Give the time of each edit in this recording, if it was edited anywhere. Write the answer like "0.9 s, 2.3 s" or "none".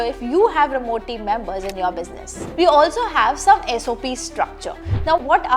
2.4 s